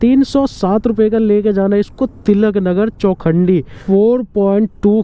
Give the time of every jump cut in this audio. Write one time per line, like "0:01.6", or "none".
0:03.7